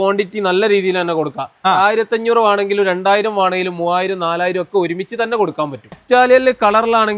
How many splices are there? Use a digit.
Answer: 1